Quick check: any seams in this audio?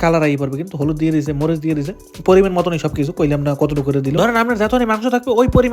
no; 0 cuts

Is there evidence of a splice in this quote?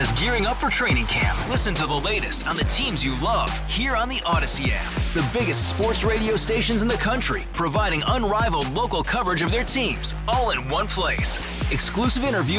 no; 0 cuts

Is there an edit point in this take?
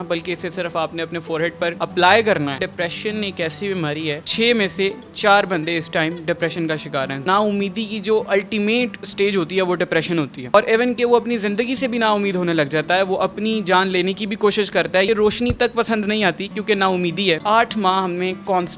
yes; 4 cuts; at 2.6 s, 7.2 s, 15.1 s, 17.4 s

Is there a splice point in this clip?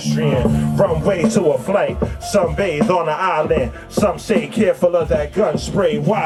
no; 0 cuts

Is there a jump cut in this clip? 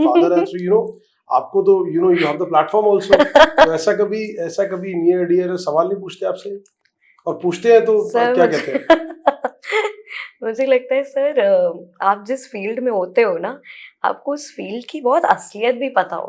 no; 0 cuts

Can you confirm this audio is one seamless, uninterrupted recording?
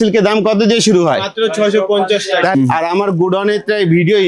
no; 1 cut; at 2.5 s

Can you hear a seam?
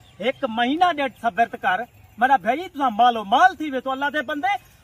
no; 0 cuts

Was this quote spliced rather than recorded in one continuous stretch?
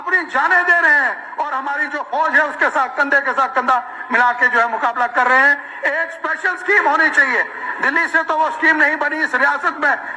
no; 0 cuts

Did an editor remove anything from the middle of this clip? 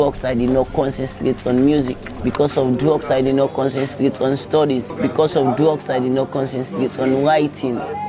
no; 0 cuts

